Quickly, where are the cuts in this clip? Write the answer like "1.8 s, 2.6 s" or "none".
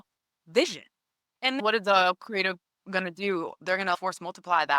1.5 s, 4.0 s